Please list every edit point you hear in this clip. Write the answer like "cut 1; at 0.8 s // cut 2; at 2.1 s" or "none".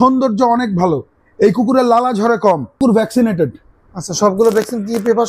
cut 1; at 2.8 s